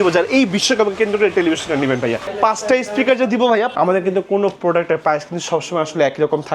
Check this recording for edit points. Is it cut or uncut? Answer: cut